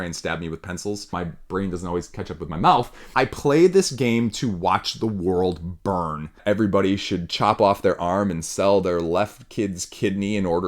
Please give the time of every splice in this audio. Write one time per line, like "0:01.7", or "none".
0:01.1
0:03.0
0:06.4